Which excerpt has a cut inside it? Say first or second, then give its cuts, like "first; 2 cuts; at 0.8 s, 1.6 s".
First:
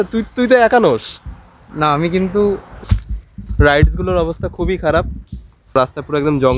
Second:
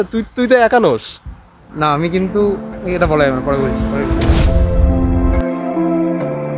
first; 1 cut; at 2.9 s